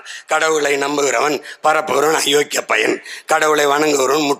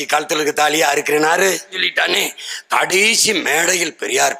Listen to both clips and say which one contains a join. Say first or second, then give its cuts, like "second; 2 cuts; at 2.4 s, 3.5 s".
second; 1 cut; at 1.9 s